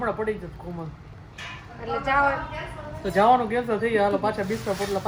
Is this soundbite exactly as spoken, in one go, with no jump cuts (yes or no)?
yes